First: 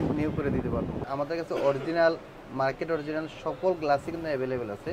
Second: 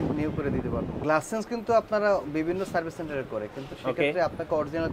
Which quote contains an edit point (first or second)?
first